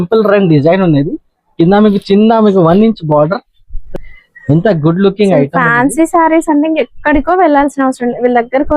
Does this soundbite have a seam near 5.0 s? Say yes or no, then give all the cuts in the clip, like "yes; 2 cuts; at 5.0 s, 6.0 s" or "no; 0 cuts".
no; 1 cut; at 3.7 s